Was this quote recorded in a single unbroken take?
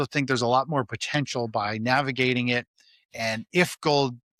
yes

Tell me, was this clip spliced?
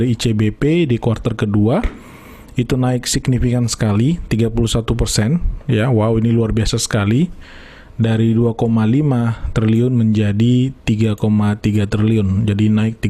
no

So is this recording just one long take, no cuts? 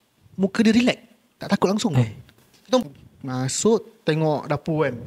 no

